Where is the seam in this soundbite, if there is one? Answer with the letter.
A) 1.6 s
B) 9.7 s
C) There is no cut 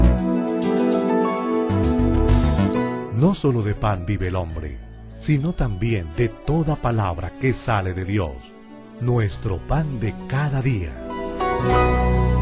C